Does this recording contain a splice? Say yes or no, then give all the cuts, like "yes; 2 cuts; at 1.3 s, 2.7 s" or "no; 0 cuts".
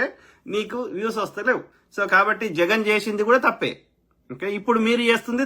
yes; 1 cut; at 1.8 s